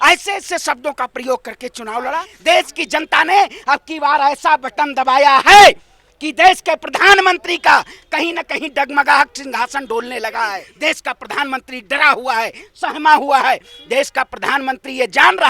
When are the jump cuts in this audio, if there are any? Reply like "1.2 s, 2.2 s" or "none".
2.3 s, 10.7 s